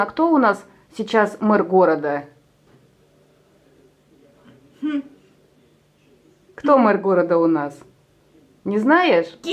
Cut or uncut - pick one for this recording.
uncut